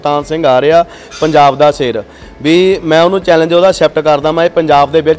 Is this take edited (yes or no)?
no